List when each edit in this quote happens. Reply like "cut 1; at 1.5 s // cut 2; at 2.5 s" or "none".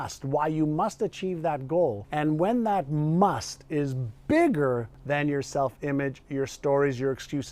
cut 1; at 2.0 s // cut 2; at 4.9 s